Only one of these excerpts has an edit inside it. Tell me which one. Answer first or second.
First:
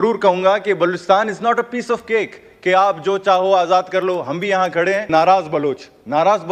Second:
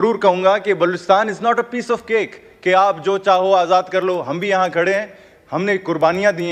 first